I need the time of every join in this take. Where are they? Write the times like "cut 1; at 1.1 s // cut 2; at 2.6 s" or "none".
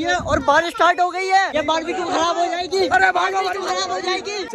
none